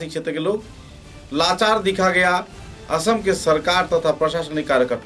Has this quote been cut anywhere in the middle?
no; 0 cuts

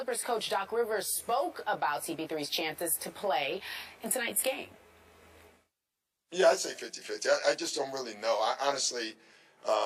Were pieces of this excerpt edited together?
yes; 1 cut; at 8.1 s

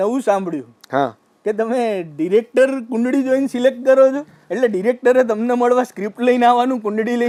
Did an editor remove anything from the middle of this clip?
no; 0 cuts

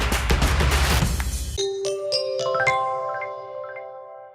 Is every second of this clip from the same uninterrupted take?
no; 1 cut; at 1.4 s

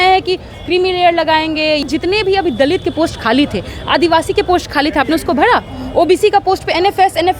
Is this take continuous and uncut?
no; 1 cut; at 1.8 s

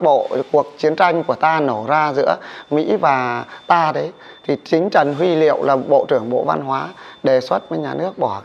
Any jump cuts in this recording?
no; 0 cuts

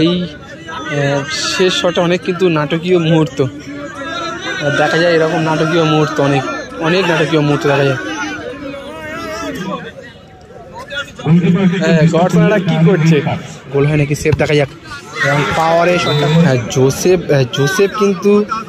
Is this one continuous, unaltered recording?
no; 3 cuts; at 9.6 s, 13.6 s, 16.4 s

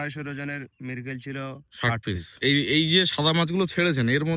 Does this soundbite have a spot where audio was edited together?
yes; 1 cut; at 2.3 s

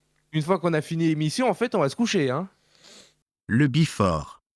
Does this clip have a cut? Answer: yes; 1 cut; at 3.3 s

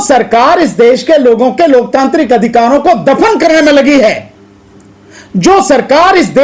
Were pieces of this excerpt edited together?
no; 0 cuts

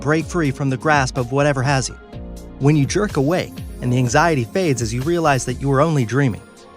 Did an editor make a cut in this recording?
yes; 1 cut; at 5.2 s

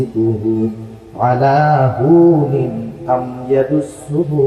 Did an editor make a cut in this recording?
no; 0 cuts

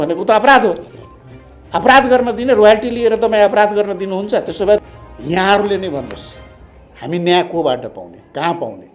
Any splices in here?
yes; 1 cut; at 4.9 s

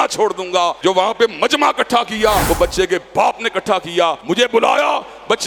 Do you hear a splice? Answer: yes; 3 cuts; at 0.8 s, 2.4 s, 4.2 s

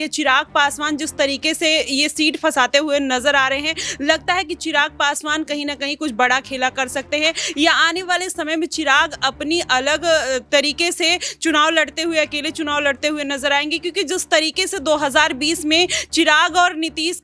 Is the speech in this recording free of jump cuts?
yes; 0 cuts

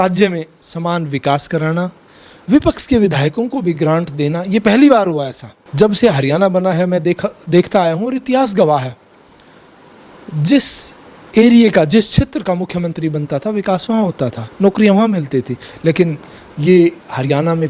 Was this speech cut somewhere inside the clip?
no; 0 cuts

